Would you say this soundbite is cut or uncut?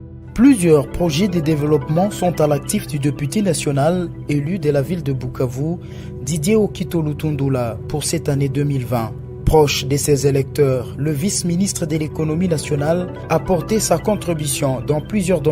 uncut